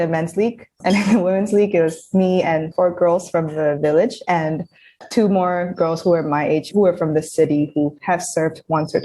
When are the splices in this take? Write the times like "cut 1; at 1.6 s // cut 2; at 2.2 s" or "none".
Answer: cut 1; at 0.8 s // cut 2; at 2.7 s // cut 3; at 4.9 s // cut 4; at 6.7 s // cut 5; at 8.0 s